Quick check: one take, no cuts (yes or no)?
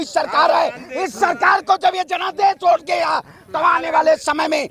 yes